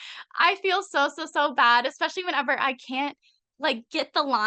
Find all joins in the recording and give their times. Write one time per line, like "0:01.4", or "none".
none